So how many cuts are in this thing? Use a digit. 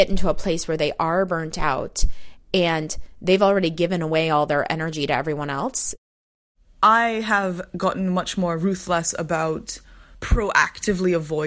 1